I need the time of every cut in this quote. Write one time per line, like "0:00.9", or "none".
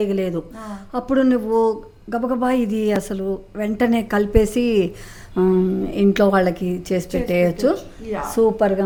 none